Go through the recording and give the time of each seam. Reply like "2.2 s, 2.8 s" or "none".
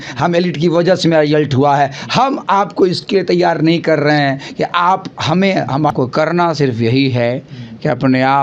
5.9 s